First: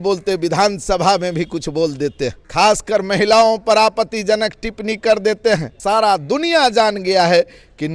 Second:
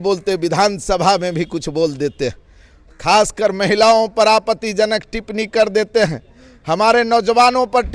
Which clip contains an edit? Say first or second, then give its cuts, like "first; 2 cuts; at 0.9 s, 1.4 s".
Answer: first; 2 cuts; at 2.4 s, 5.7 s